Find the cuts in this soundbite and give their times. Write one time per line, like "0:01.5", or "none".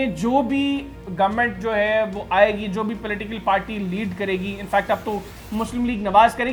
none